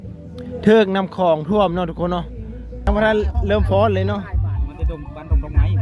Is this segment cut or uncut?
cut